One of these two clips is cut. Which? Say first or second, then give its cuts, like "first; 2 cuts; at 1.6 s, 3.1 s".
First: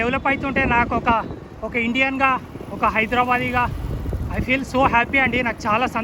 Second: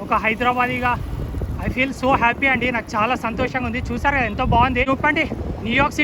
second; 1 cut; at 4.9 s